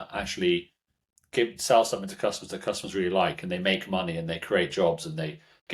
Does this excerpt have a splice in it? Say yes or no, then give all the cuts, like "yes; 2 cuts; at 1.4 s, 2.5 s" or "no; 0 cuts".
no; 0 cuts